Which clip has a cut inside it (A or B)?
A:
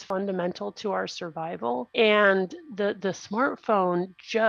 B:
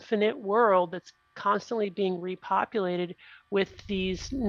A